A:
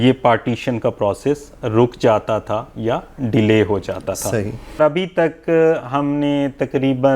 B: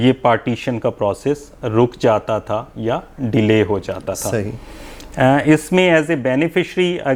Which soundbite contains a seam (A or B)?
A